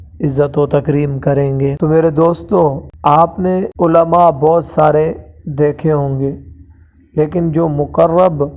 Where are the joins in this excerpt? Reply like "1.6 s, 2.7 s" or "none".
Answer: 1.8 s, 2.9 s, 3.7 s